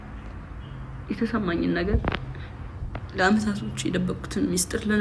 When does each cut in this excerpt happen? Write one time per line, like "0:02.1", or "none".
none